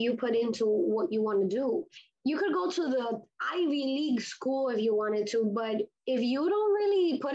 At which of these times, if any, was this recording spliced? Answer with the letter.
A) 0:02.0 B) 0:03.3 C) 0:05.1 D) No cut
A